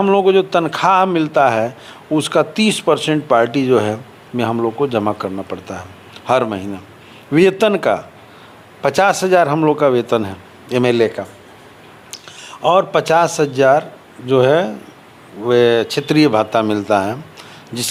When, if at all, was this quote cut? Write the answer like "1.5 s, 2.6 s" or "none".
none